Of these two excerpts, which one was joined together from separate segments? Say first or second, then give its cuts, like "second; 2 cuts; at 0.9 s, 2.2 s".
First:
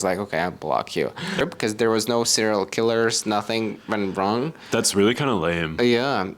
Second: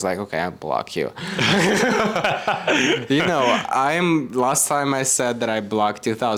first; 1 cut; at 1.4 s